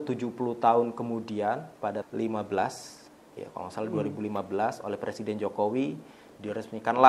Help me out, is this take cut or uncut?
cut